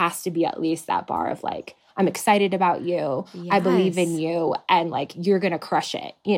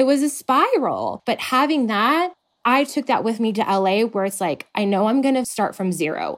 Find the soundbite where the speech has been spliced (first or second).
second